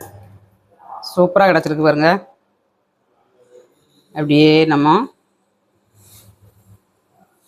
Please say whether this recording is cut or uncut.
uncut